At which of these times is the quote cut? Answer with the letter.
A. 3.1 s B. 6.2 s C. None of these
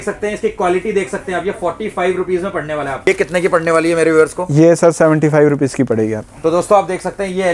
A